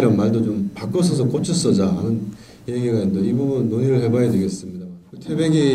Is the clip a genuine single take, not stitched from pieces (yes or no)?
no